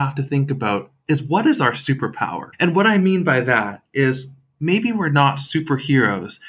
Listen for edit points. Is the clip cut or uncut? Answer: cut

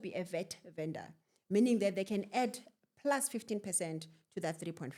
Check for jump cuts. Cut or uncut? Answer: uncut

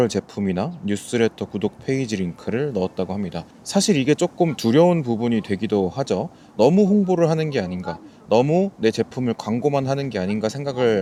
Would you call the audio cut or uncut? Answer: uncut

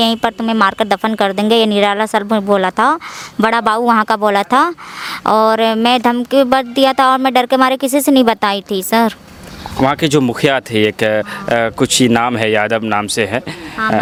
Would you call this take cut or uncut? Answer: uncut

